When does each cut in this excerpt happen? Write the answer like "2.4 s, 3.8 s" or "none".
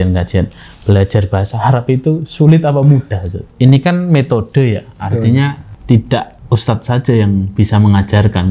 3.5 s, 5.7 s, 6.4 s